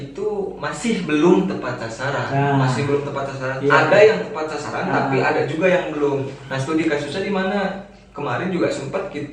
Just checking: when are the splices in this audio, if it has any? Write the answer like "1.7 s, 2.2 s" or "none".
none